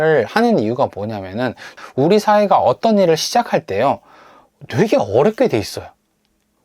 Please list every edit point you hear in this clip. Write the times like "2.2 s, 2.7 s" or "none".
1.8 s

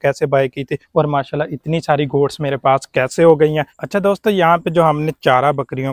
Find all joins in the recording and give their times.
3.7 s

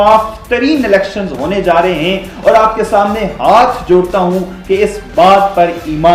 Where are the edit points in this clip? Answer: none

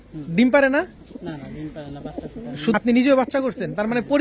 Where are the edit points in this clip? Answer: 2.7 s

